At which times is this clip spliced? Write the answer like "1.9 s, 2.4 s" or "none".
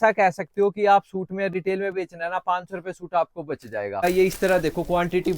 4.0 s